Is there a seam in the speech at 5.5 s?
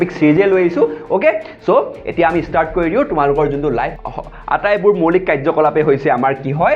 no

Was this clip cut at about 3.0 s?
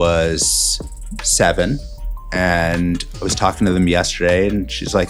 no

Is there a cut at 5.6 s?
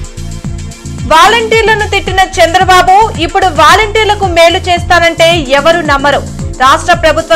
no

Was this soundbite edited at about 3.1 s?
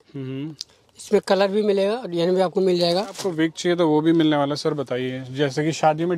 yes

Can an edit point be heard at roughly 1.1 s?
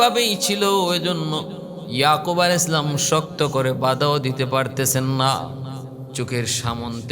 no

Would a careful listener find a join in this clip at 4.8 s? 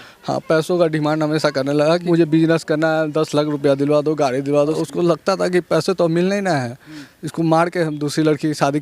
yes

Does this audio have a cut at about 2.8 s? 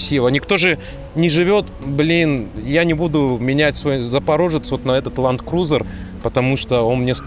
no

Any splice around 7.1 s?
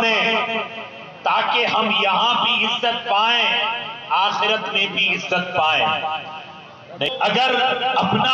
yes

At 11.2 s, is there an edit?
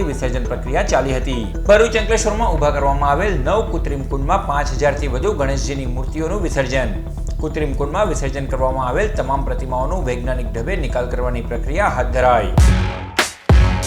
no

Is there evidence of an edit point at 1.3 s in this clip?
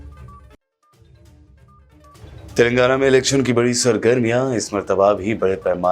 yes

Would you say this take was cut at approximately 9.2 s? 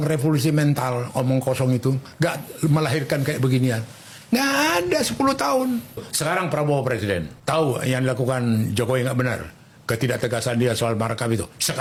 no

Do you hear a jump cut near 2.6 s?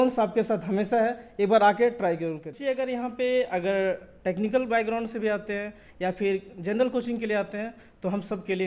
yes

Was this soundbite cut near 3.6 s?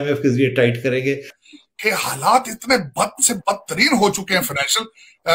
no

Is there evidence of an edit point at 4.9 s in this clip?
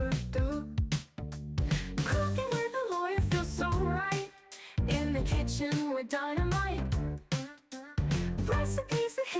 no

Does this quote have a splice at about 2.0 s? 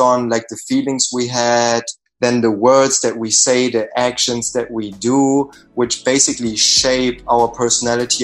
yes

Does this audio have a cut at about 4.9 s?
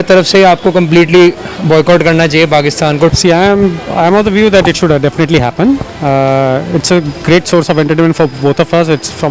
no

